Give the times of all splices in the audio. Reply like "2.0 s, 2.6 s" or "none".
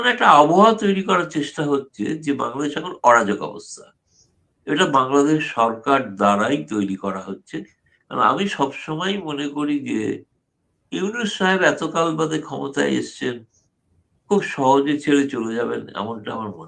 none